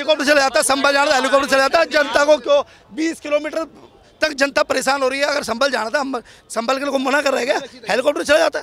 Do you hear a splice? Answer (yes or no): no